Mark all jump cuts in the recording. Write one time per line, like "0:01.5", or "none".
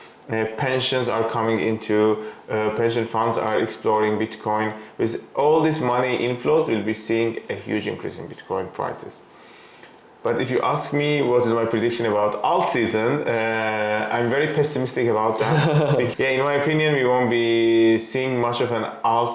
0:16.1